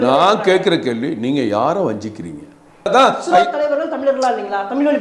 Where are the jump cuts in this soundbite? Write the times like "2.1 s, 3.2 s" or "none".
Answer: 2.9 s